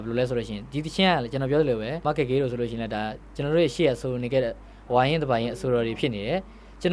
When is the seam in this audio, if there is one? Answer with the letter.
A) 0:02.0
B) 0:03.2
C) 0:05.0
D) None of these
A